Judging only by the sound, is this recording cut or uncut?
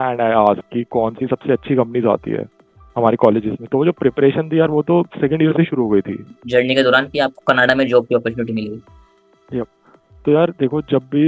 cut